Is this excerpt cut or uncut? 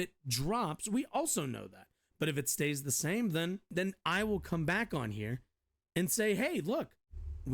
cut